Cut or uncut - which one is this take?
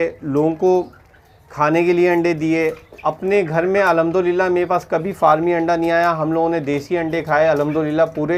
uncut